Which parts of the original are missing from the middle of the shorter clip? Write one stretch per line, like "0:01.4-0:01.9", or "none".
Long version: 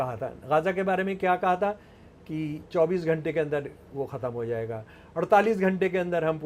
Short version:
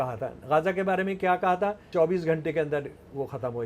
0:01.8-0:02.6